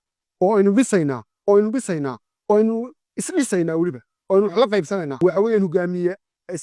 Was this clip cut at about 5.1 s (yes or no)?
yes